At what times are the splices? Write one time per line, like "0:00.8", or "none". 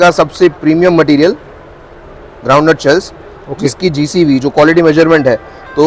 none